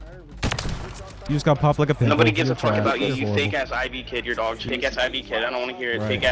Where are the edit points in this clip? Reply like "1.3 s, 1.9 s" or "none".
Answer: 1.1 s, 4.6 s